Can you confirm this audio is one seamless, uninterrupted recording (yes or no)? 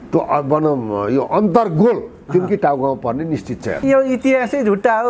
no